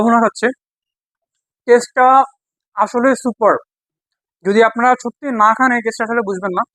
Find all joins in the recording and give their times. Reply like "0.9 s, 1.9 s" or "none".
none